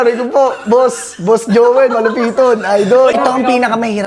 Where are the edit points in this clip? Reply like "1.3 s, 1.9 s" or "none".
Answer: 3.2 s

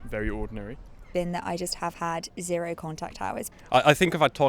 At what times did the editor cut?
1.1 s, 3.5 s

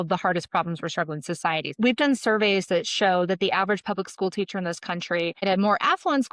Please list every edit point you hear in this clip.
1.7 s

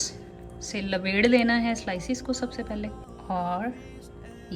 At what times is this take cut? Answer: 3.1 s

